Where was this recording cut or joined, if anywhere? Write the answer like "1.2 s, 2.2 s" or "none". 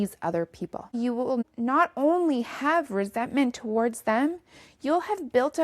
1.0 s

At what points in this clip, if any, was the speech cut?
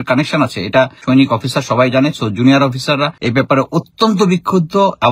1.0 s, 3.2 s

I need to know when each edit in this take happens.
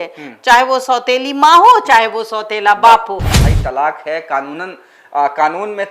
3.4 s

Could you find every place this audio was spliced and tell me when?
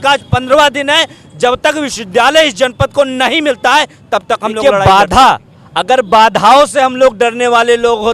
4.6 s

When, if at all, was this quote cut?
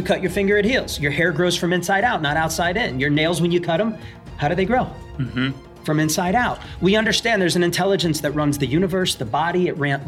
none

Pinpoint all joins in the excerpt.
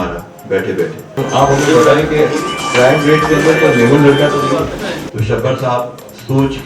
1.2 s, 5.1 s

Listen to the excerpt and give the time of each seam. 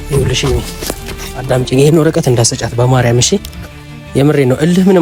none

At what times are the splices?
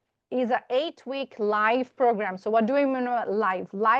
none

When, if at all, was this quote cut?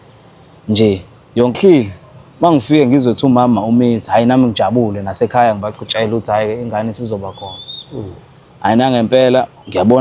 1.6 s

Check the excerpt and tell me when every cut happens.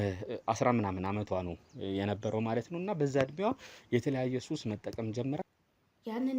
5.4 s

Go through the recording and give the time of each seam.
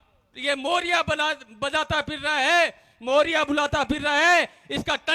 none

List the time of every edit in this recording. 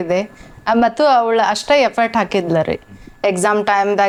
none

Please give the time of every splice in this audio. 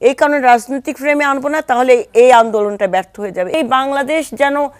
3.5 s

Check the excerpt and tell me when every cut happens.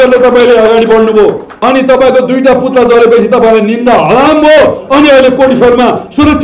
1.5 s

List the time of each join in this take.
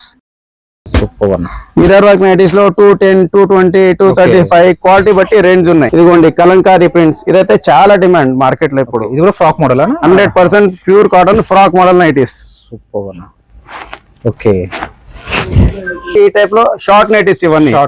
5.9 s, 16.2 s

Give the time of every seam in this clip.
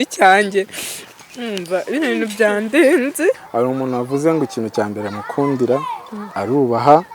3.4 s

